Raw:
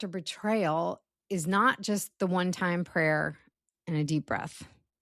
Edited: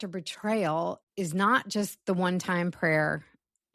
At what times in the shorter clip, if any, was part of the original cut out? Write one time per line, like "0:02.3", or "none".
0:01.0